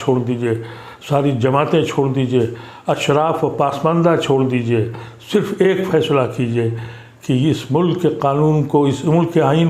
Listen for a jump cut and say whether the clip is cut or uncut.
uncut